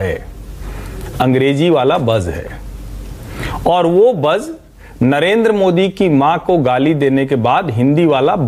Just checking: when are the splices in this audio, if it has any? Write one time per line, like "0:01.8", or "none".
none

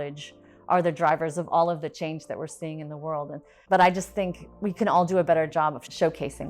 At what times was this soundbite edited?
0:03.5

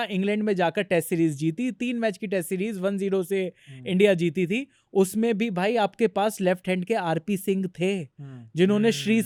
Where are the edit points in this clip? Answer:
none

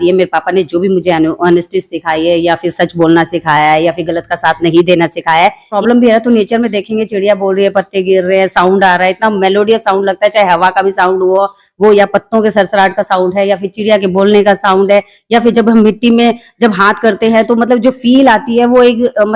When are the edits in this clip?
0:05.7

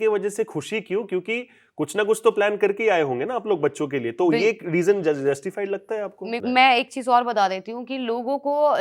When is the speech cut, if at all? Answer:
0:06.4

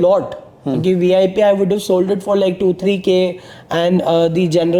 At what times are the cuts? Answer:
none

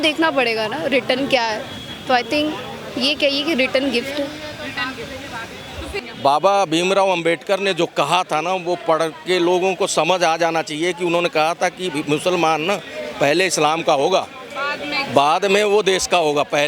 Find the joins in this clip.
0:06.0

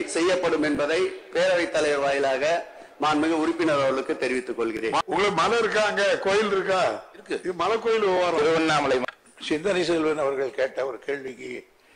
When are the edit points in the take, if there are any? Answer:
0:05.0
0:09.0

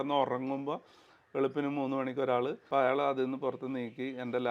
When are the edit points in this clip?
0:02.6

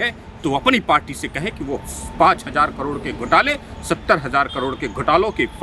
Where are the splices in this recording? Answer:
none

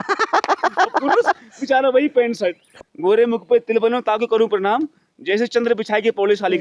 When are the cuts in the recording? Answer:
0:02.7

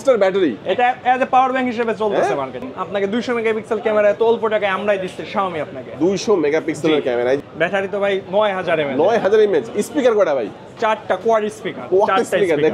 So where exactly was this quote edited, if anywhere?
0:02.6
0:07.4

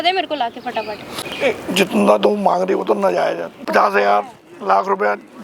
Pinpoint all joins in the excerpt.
0:01.3
0:03.5

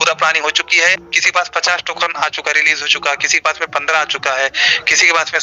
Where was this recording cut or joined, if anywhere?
0:00.9

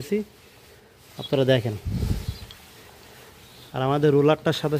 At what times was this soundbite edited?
none

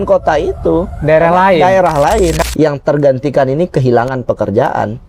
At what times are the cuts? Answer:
0:02.4

